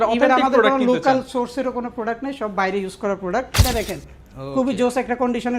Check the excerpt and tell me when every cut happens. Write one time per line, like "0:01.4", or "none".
0:03.6